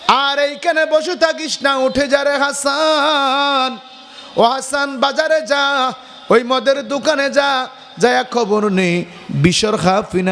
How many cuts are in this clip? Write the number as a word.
zero